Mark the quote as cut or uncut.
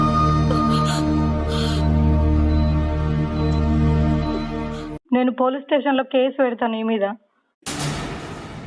cut